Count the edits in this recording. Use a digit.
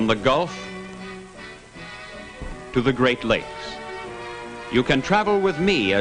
1